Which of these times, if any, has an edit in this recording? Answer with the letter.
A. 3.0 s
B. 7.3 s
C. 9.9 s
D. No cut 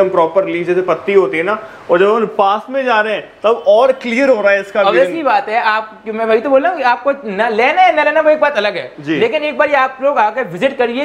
D